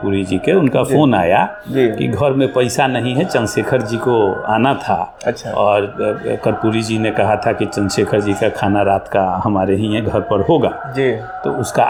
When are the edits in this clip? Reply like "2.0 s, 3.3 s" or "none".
none